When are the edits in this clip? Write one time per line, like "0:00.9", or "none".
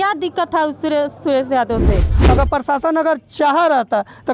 0:02.1